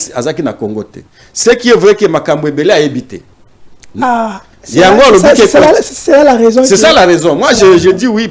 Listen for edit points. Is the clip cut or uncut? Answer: uncut